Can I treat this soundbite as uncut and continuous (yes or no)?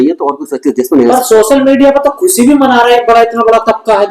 yes